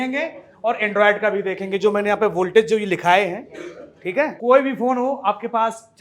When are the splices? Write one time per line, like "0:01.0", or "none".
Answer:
0:04.4